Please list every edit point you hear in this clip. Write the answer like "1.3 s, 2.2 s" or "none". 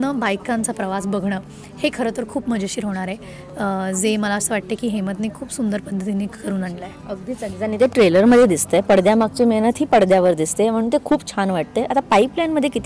none